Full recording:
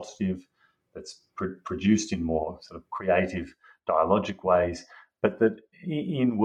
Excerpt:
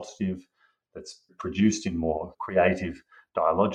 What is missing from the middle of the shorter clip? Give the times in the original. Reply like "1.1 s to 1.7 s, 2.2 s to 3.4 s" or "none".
1.3 s to 1.6 s, 2.6 s to 2.9 s

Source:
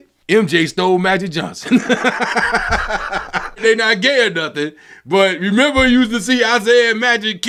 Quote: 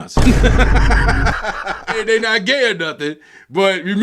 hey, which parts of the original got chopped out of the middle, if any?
3.4 s to 3.5 s

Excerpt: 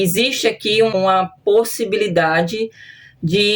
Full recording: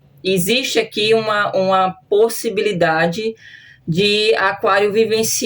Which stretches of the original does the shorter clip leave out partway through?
1.3 s to 1.6 s

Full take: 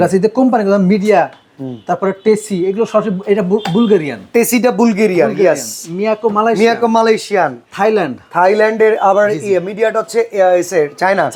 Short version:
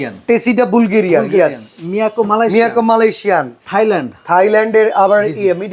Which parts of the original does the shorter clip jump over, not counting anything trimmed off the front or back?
none

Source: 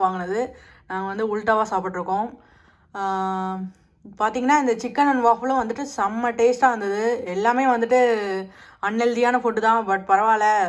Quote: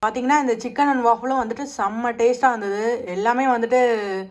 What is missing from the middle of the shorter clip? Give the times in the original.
none

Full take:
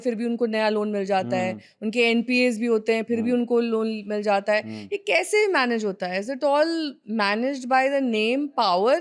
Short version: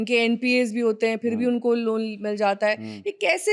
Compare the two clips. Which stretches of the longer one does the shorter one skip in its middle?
none

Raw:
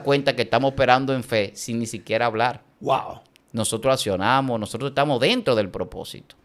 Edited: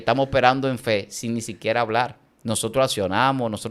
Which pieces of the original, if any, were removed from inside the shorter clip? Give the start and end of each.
2.7 s to 3.3 s

